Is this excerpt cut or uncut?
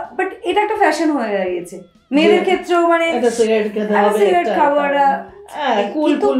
uncut